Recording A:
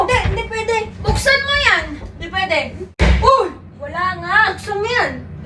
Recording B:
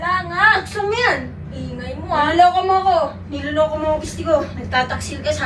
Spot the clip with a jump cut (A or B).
A